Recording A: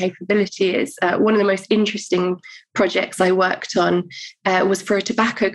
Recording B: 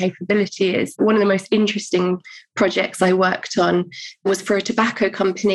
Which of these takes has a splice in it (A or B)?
B